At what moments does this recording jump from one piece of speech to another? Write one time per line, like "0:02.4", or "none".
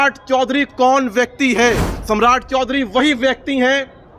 0:01.9